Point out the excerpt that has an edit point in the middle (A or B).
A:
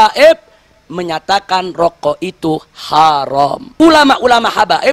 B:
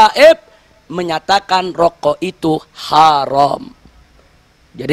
A